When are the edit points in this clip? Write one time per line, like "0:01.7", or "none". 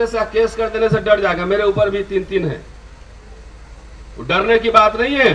none

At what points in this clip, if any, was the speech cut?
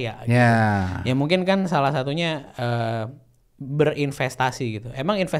none

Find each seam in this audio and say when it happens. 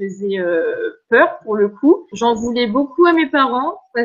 0:02.1

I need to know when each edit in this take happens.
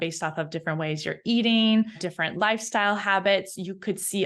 0:02.0

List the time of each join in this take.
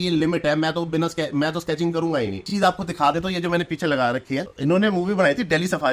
0:02.5
0:04.5

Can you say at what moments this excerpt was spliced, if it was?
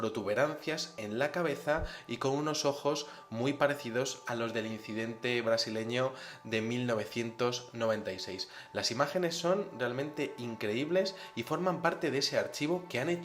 0:03.8

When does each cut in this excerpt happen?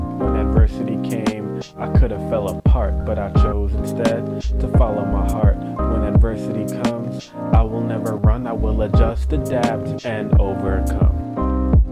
none

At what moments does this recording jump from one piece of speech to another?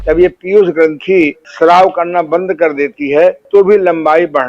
0:01.4
0:03.4

